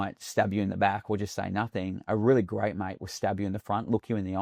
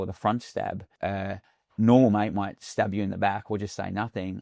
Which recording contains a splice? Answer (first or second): second